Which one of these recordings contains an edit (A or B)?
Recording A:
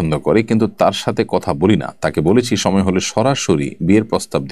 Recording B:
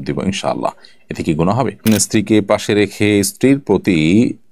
B